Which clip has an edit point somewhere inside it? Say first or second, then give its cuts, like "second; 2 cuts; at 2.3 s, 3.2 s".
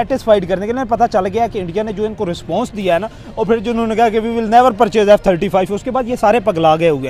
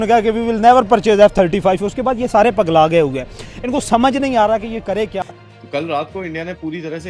second; 1 cut; at 5.5 s